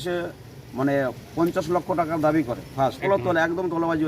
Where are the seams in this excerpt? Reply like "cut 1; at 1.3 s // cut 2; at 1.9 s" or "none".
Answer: cut 1; at 3.0 s